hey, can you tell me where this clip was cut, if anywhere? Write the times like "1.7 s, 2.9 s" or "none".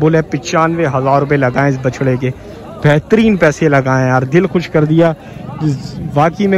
none